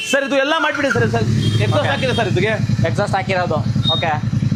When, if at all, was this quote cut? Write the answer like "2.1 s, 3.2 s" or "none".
none